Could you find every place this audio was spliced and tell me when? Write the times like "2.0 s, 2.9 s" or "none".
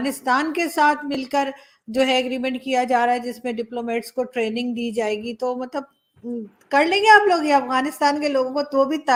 none